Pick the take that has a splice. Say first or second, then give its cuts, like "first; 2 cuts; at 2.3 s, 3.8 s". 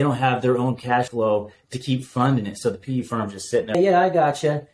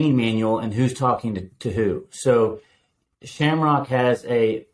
first; 2 cuts; at 1.1 s, 3.7 s